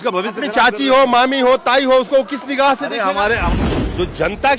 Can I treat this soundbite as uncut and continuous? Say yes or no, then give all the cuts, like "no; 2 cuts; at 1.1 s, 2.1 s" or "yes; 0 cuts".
no; 1 cut; at 3.4 s